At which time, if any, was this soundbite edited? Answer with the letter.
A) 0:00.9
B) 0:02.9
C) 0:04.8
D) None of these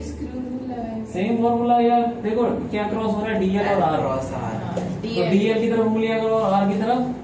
D